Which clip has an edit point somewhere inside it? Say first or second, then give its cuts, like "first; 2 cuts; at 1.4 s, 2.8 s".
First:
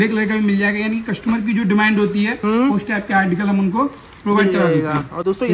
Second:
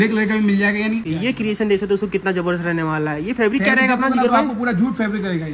second; 1 cut; at 1.0 s